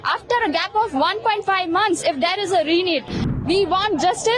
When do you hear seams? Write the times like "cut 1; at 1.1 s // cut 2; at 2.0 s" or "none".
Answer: cut 1; at 3.3 s